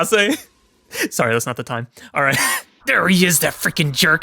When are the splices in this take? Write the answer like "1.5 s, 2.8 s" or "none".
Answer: 2.7 s